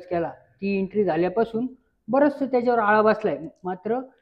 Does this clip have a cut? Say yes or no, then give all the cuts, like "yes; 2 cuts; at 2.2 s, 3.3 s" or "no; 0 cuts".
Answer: no; 0 cuts